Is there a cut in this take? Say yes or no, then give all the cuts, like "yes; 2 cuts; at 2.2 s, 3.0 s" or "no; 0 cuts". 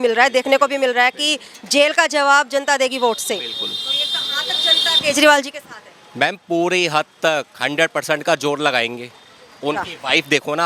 no; 0 cuts